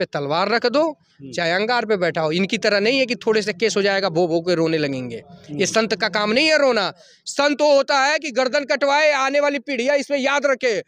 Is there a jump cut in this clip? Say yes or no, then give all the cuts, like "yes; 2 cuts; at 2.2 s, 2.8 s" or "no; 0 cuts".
no; 0 cuts